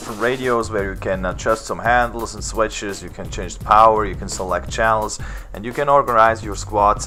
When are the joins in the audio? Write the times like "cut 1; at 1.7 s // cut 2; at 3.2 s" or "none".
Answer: none